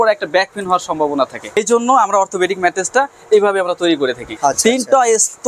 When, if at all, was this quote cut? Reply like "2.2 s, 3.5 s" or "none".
1.6 s, 4.3 s